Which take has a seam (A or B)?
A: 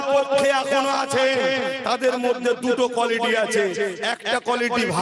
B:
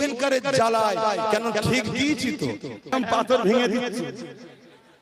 B